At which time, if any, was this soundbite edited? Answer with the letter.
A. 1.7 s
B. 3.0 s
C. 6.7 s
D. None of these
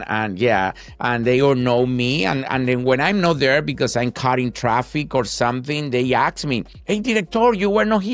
C